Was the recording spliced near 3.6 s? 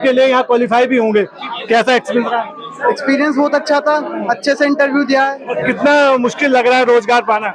no; 2 cuts; at 1.4 s, 5.4 s

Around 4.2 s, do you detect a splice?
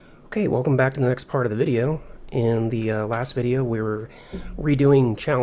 no; 0 cuts

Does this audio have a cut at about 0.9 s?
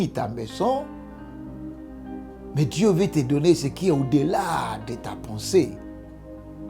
no; 0 cuts

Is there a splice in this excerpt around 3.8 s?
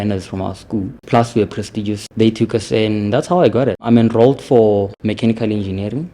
yes; 4 cuts; at 1.0 s, 2.0 s, 3.8 s, 4.9 s

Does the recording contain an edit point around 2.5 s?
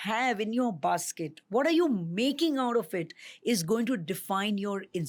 no; 0 cuts

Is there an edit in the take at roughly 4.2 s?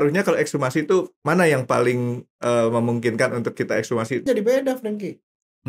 yes; 1 cut; at 4.2 s

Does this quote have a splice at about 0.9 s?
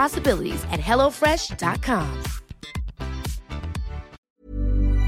no; 1 cut; at 4.2 s

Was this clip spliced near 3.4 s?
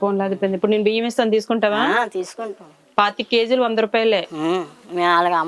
no; 0 cuts

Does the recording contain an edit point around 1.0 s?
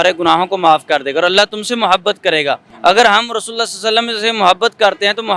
no; 1 cut; at 2.7 s

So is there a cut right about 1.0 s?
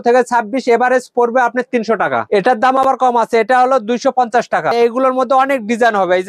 no; 2 cuts; at 2.2 s, 4.7 s

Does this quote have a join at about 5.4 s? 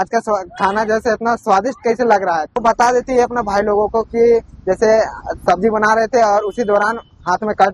no; 1 cut; at 2.6 s

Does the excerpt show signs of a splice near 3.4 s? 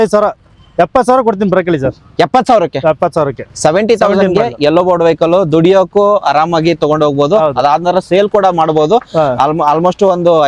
no; 0 cuts

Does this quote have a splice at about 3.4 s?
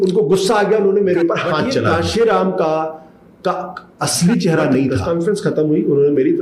no; 2 cuts; at 1.9 s, 5.0 s

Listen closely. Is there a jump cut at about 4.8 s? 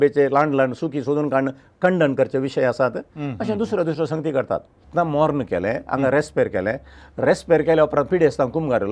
yes; 1 cut; at 4.8 s

